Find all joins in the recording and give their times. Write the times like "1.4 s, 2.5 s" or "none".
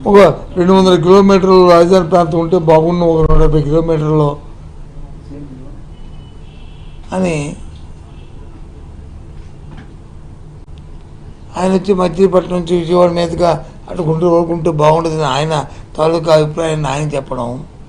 none